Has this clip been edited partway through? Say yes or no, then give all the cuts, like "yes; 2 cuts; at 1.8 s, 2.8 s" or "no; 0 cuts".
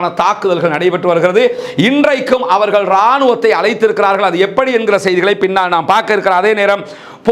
no; 0 cuts